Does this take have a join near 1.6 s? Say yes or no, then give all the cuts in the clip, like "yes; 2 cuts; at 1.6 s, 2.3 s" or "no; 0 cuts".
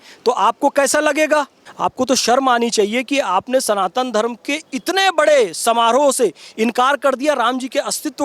yes; 1 cut; at 1.6 s